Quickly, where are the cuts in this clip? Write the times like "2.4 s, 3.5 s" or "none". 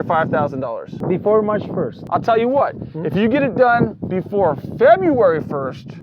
0.9 s, 2.0 s